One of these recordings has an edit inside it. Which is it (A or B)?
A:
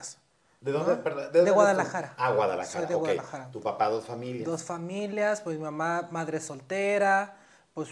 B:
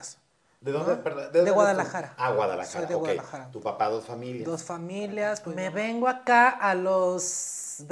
B